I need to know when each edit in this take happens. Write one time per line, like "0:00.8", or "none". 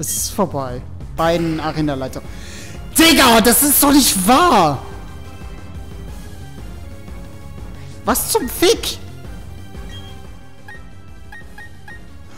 0:01.0

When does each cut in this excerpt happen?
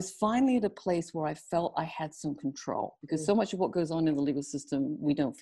0:03.0

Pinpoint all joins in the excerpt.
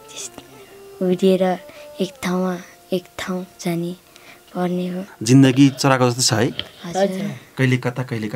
0:05.1

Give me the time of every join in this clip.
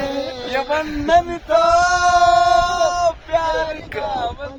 none

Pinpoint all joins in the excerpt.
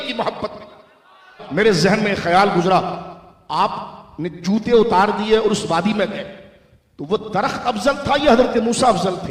0:01.4

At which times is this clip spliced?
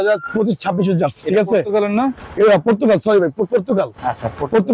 none

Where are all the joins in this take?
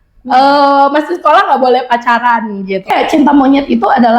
0:02.9

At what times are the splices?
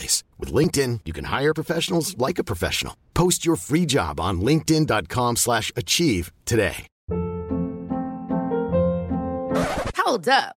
none

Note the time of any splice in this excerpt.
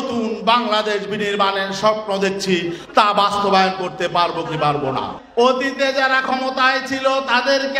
0:05.2

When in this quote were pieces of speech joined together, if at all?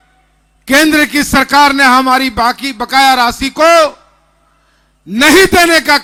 none

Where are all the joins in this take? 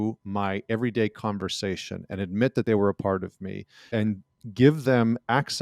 0:02.6

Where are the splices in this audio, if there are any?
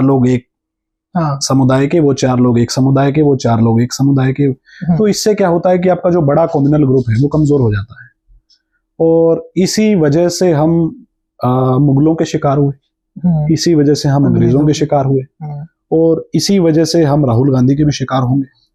none

